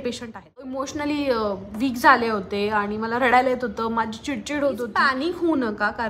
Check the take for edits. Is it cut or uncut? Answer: cut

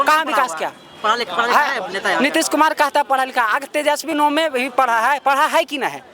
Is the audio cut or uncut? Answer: uncut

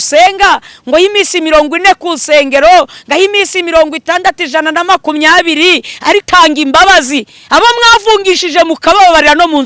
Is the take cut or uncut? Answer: cut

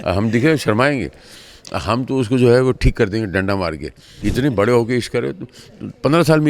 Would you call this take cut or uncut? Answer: cut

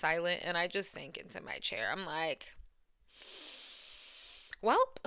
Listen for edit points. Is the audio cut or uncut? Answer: uncut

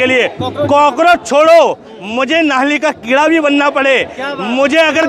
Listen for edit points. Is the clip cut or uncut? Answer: uncut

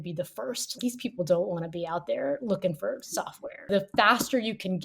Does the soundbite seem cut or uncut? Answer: cut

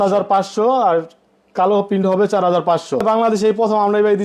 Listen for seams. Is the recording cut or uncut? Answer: cut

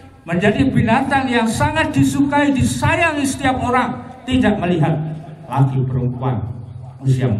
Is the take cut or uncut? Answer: uncut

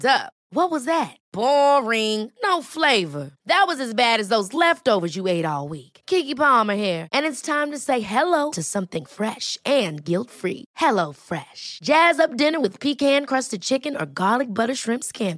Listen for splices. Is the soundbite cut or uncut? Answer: uncut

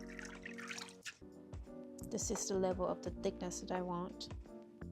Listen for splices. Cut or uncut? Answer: cut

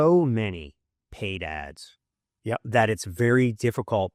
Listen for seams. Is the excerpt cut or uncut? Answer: uncut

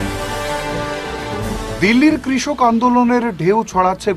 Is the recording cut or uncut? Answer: cut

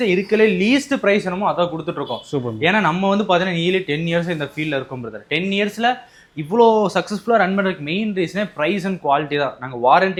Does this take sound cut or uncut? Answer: uncut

